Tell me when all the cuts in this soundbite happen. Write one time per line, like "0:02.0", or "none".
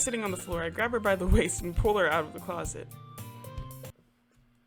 none